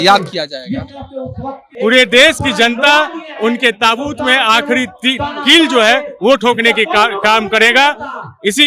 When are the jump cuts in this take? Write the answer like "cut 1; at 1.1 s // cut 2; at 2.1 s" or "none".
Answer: cut 1; at 1.6 s